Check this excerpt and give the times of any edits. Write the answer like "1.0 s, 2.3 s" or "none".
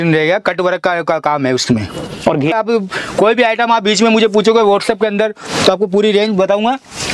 2.5 s

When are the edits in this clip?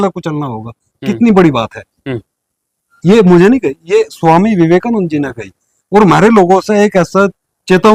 none

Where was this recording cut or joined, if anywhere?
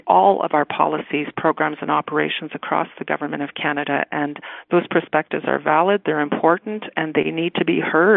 none

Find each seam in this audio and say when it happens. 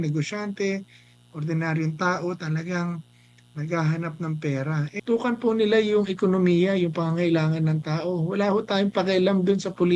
4.9 s

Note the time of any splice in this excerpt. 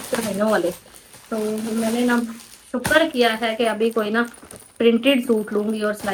none

